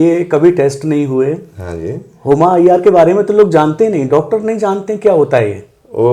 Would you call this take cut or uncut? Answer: uncut